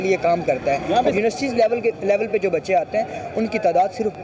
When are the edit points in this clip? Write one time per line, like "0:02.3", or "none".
0:01.1